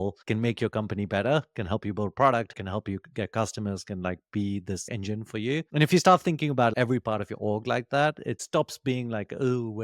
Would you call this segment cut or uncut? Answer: cut